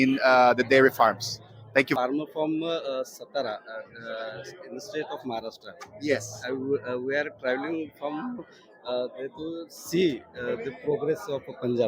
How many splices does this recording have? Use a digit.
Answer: 1